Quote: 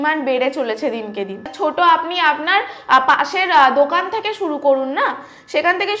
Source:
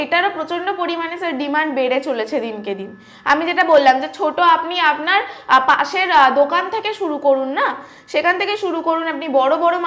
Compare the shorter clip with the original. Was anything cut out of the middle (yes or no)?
yes